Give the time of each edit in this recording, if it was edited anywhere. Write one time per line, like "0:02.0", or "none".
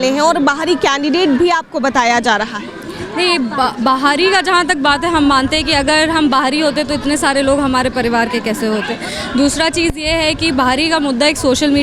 none